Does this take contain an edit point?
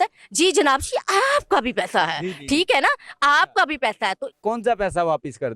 yes; 1 cut; at 4.3 s

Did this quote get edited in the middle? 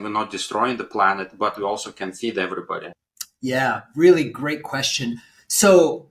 no; 0 cuts

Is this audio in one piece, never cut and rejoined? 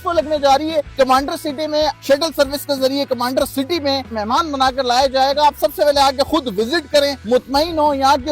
no; 4 cuts; at 0.9 s, 2.0 s, 4.2 s, 7.2 s

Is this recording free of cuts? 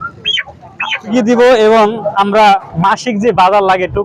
no; 1 cut; at 1.1 s

